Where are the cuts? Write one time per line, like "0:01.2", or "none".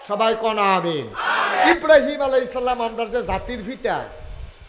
0:01.7